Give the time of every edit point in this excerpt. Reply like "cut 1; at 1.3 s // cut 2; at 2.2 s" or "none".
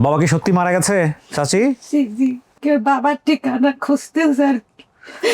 cut 1; at 2.5 s